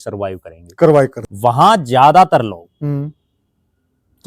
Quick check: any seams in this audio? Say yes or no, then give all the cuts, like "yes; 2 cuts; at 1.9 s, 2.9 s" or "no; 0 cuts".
yes; 1 cut; at 1.2 s